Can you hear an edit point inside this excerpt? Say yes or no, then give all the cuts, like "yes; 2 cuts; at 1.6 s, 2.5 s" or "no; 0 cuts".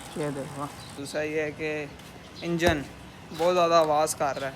yes; 1 cut; at 1.0 s